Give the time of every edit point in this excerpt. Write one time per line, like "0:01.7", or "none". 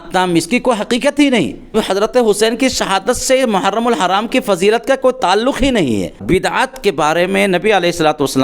0:01.7
0:06.2

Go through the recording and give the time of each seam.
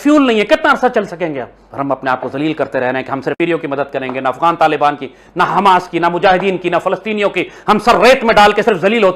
0:03.4

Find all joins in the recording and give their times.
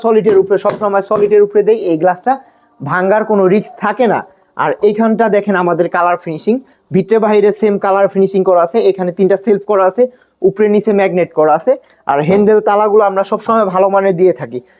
none

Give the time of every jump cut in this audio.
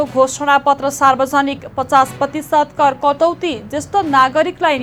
none

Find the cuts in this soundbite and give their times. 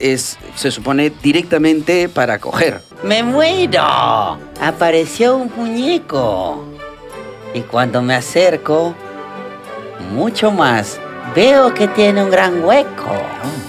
0:02.8

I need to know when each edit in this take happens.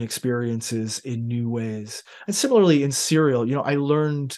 none

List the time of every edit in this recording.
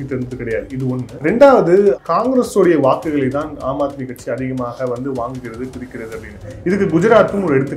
0:01.1
0:02.0

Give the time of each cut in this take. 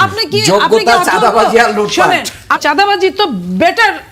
0:02.6

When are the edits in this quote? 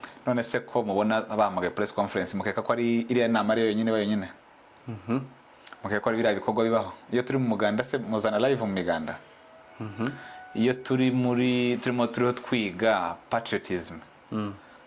none

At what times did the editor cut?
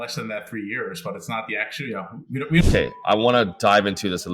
0:02.6

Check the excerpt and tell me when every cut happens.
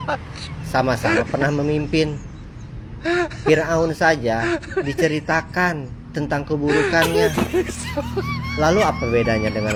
none

